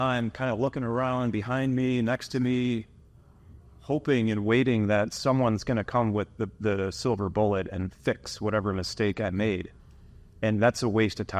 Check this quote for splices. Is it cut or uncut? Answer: uncut